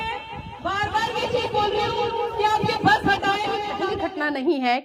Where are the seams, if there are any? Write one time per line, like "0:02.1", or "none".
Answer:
0:03.9